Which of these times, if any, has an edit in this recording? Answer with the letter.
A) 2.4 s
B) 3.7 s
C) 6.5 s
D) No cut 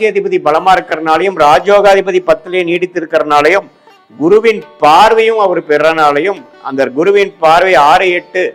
D